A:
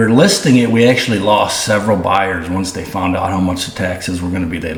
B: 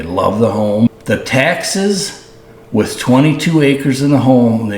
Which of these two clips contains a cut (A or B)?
B